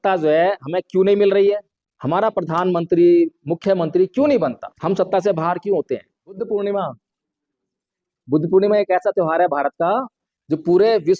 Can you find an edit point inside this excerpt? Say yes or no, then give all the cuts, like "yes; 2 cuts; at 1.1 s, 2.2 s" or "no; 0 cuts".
yes; 3 cuts; at 1.7 s, 4.7 s, 6.4 s